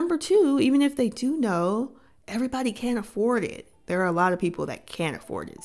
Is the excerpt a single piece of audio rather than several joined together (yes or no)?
no